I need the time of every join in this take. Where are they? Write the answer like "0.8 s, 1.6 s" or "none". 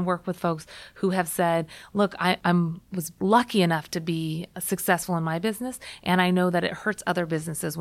2.5 s